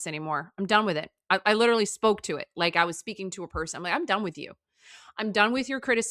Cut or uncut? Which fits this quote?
uncut